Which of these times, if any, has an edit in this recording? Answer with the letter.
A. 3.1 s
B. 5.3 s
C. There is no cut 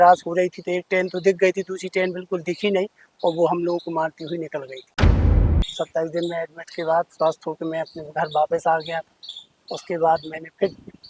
B